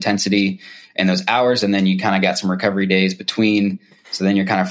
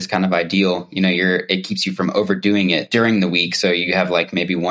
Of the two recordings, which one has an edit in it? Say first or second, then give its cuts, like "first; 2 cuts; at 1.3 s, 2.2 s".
second; 1 cut; at 2.8 s